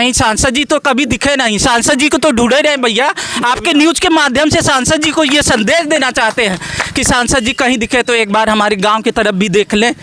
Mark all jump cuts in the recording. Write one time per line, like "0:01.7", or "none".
none